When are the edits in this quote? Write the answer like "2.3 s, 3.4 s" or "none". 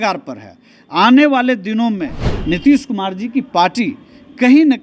2.3 s